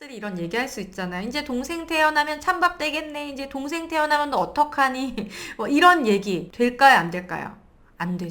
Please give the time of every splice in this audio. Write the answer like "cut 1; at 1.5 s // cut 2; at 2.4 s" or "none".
cut 1; at 6.4 s